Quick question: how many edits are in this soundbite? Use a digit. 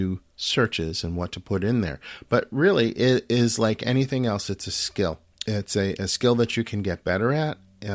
1